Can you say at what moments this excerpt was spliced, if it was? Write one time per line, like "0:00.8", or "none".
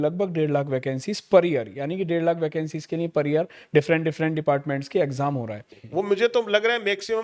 0:05.7